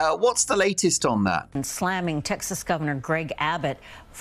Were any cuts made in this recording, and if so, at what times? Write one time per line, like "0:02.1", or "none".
0:01.5